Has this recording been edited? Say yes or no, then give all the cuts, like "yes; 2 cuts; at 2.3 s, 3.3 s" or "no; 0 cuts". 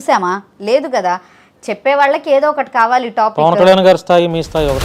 no; 0 cuts